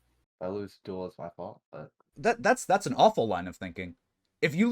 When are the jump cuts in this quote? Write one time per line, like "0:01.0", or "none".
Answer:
0:02.0